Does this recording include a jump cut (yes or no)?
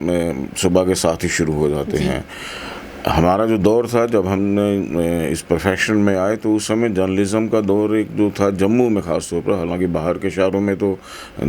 no